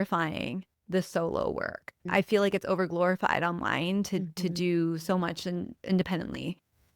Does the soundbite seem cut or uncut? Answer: cut